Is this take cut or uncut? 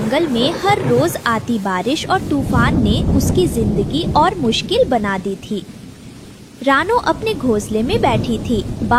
uncut